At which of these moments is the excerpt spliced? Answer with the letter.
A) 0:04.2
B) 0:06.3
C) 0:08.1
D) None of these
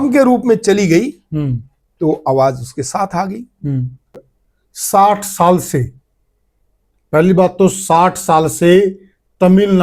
A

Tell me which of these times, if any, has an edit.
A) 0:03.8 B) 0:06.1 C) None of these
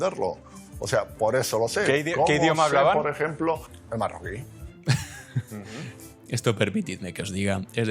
A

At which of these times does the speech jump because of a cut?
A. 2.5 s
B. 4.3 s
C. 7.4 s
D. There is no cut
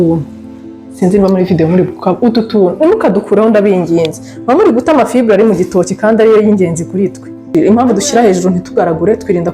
C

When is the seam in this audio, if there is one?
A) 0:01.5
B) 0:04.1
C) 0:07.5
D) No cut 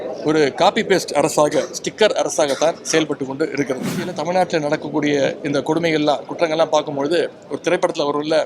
B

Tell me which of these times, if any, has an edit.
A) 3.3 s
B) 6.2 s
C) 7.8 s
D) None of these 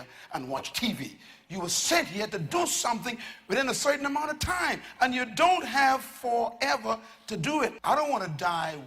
C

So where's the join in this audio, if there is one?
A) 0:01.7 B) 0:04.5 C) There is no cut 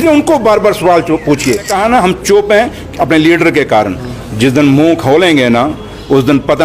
A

